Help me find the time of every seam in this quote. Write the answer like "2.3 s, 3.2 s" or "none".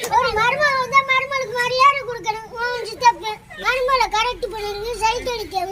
none